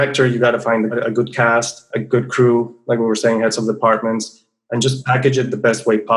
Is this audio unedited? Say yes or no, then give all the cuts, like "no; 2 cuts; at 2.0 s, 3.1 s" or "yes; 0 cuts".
no; 1 cut; at 0.9 s